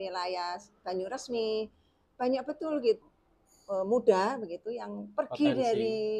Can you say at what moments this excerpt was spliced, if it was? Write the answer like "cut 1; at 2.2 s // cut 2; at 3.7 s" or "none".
cut 1; at 3.0 s